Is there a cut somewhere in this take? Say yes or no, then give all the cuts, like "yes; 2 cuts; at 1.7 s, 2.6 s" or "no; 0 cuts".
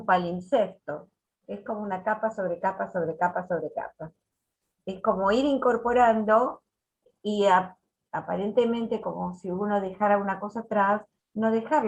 yes; 1 cut; at 7.1 s